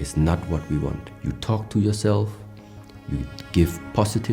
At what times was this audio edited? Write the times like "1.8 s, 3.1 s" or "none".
1.1 s

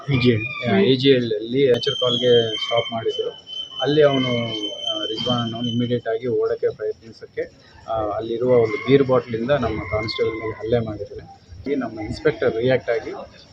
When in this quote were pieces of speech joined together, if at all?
1.7 s, 11.7 s

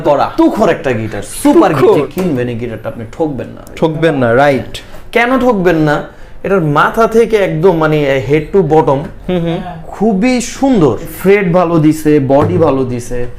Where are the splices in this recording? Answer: 2.1 s, 11.1 s

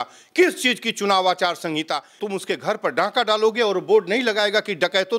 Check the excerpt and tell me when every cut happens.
2.2 s

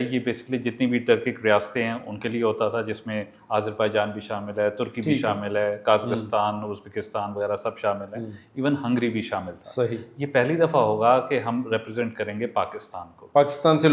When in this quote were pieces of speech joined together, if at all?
none

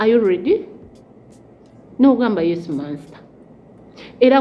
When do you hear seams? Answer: none

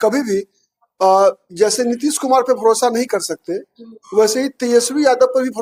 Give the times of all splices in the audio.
none

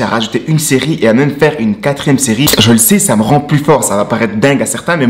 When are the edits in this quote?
2.5 s

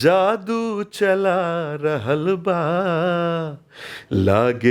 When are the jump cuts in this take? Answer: none

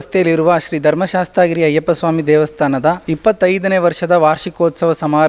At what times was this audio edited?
none

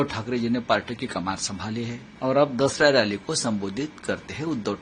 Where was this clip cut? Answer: 2.1 s

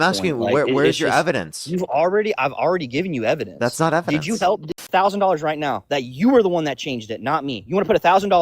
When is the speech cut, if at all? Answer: 4.9 s

